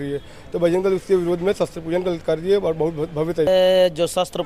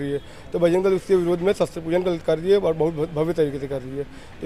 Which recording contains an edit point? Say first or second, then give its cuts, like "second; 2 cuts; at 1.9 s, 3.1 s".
first; 1 cut; at 3.5 s